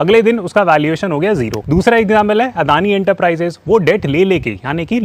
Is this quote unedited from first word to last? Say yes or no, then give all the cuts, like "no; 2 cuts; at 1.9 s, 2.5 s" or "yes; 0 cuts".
no; 1 cut; at 1.6 s